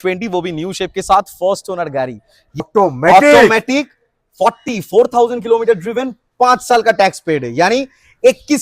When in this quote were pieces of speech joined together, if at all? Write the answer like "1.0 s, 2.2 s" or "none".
2.6 s

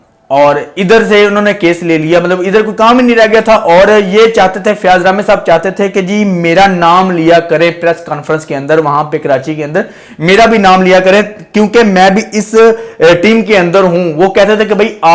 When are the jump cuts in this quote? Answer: none

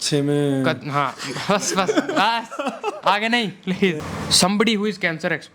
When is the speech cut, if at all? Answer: 4.0 s

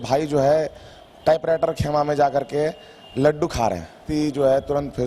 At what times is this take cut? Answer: 4.0 s

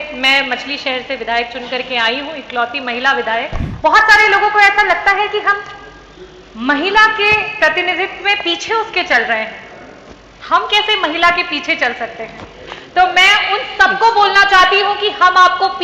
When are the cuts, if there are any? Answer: 3.6 s

